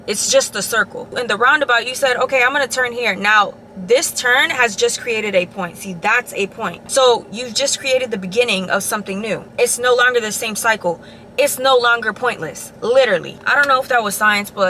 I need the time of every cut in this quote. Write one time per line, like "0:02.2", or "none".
0:01.0
0:06.8